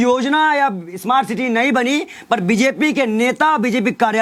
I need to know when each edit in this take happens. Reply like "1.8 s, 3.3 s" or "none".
none

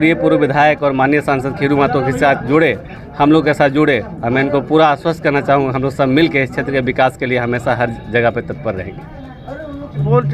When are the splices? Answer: none

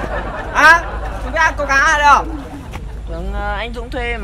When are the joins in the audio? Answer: none

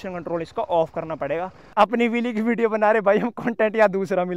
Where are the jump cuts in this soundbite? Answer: 1.7 s

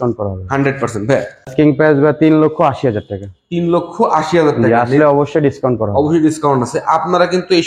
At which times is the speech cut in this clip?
1.5 s

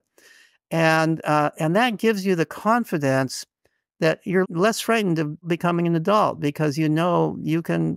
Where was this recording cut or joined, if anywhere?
4.4 s, 5.4 s

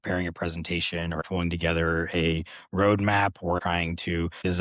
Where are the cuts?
1.2 s, 3.7 s

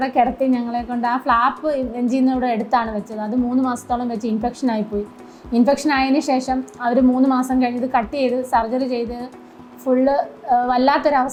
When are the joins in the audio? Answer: none

